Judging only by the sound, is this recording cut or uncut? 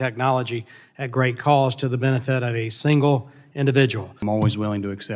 cut